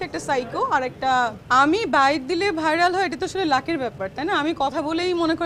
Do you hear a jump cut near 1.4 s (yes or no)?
yes